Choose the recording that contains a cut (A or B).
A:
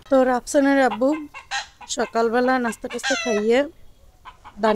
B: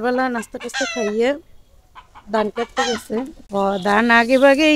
B